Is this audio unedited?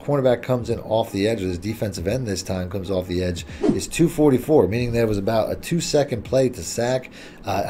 yes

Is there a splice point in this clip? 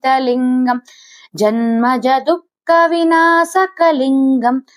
no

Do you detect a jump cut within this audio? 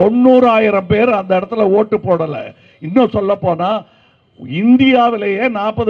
no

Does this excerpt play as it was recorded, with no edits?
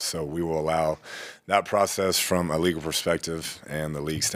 yes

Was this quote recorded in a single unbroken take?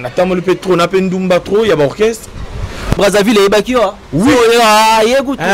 no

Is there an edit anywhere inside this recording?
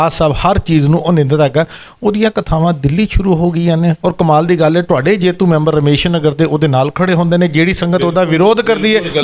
no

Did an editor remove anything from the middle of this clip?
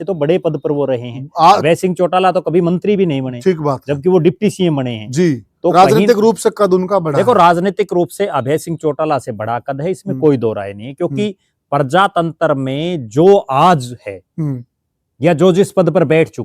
no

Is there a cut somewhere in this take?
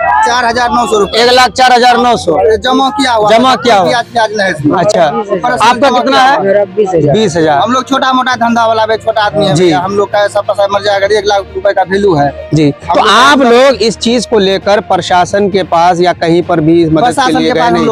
no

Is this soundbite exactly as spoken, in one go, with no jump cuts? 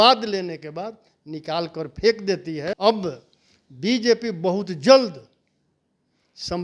no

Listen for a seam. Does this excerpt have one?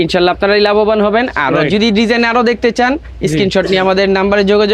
no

